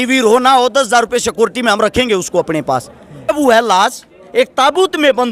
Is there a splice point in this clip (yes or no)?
yes